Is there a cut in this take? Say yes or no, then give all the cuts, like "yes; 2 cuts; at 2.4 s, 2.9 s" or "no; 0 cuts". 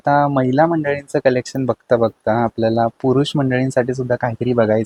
no; 0 cuts